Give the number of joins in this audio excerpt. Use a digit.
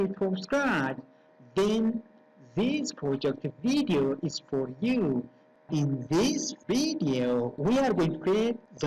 1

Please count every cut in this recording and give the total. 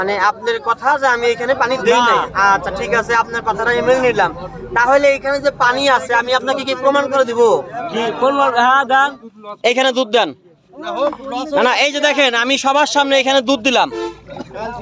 1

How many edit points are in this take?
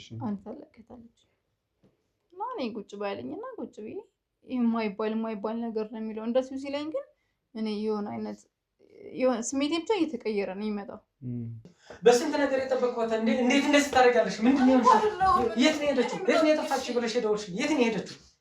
1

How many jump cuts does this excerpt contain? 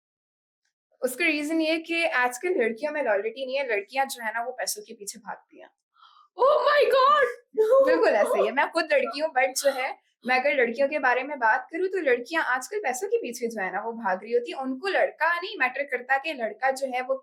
0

